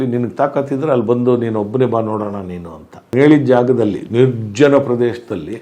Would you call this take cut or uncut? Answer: cut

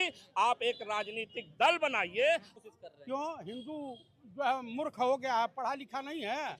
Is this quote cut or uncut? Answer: cut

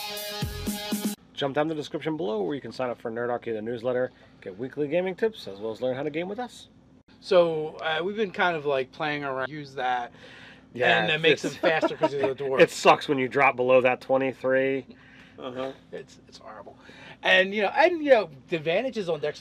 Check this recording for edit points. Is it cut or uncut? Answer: uncut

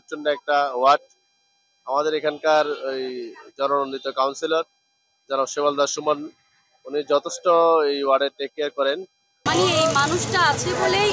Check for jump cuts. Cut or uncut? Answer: cut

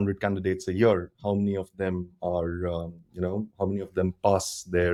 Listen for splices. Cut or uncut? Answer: uncut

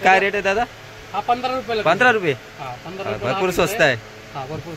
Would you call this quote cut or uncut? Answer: uncut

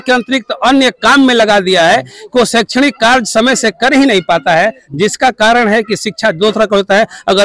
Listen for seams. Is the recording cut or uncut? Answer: uncut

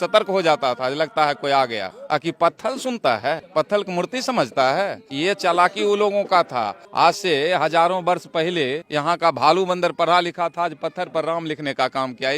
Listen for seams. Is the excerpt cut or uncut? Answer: cut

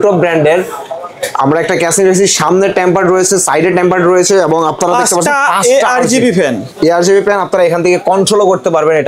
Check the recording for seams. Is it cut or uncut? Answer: uncut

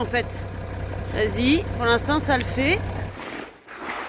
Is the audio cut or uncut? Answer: cut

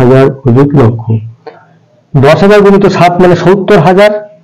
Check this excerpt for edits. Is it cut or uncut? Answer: uncut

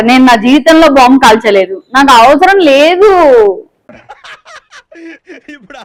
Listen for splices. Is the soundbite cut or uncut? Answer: uncut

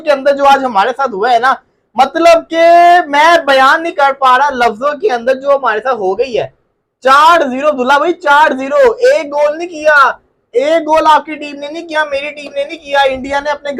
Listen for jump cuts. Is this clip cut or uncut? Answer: uncut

